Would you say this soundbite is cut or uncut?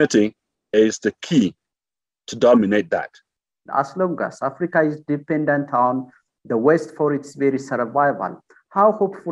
cut